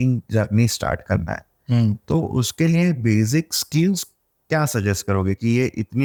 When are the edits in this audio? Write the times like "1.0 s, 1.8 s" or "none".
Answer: none